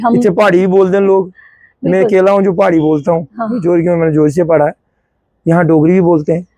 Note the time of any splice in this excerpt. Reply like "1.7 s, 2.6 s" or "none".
none